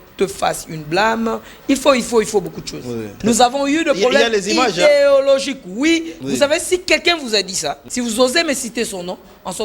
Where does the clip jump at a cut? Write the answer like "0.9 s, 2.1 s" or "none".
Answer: 3.1 s, 6.1 s, 7.8 s